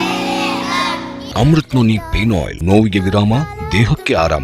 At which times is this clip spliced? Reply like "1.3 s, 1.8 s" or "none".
1.3 s, 2.5 s